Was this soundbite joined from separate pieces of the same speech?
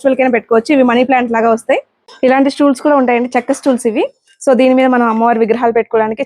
yes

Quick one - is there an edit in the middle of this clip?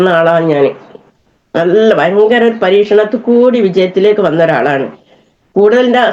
no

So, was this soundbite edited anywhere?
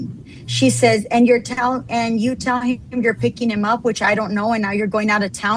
no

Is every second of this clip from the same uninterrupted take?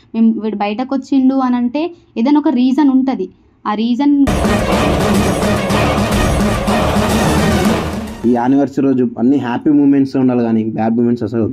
no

